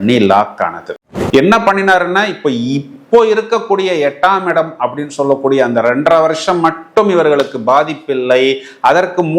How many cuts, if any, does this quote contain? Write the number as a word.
one